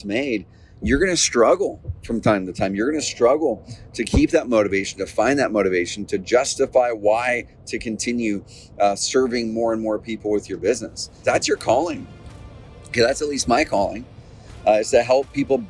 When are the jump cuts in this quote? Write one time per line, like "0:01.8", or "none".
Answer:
0:11.2